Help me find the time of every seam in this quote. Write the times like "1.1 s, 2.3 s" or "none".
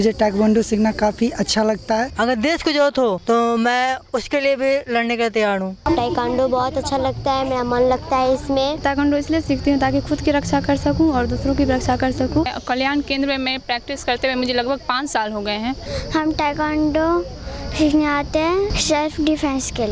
2.1 s, 3.2 s, 5.8 s, 8.8 s, 12.6 s, 15.9 s, 18.8 s